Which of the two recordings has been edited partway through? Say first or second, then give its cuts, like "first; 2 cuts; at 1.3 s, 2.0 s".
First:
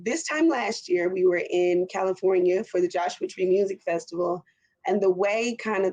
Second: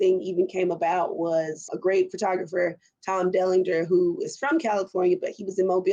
second; 1 cut; at 1.7 s